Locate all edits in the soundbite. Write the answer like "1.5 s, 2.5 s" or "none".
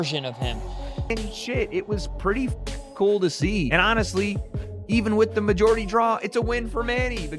1.0 s

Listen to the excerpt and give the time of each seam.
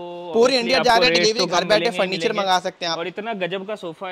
none

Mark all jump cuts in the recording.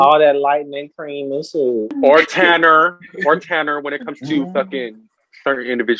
2.0 s

